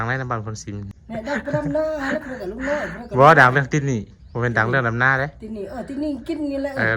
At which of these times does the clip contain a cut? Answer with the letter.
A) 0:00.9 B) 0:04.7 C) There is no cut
A